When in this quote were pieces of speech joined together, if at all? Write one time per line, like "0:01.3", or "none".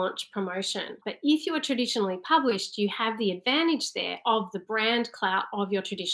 0:01.0